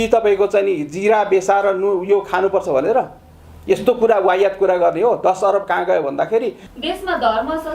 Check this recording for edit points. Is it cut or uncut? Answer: cut